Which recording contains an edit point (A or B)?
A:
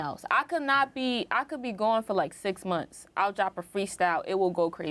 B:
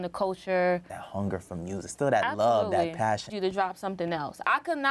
B